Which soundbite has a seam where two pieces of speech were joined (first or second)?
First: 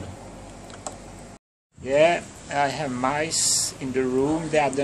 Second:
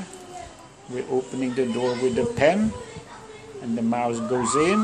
first